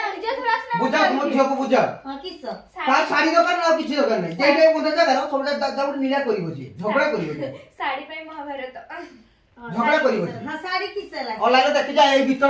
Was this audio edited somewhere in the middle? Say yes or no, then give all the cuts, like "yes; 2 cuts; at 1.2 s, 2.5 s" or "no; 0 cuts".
no; 0 cuts